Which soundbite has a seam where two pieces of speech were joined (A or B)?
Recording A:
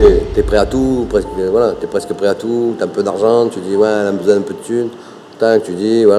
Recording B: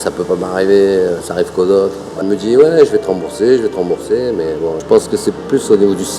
B